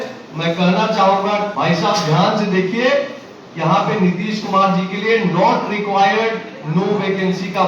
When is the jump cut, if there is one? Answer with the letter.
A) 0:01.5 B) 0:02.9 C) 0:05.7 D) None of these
A